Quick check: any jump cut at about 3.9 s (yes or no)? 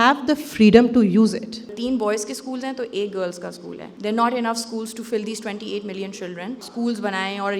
yes